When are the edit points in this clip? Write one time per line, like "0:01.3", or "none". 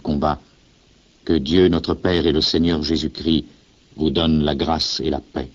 0:04.1